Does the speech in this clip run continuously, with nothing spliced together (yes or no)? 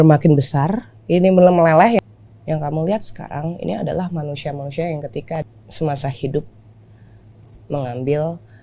no